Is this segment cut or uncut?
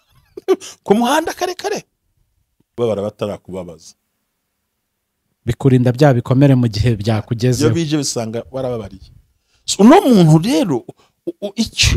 cut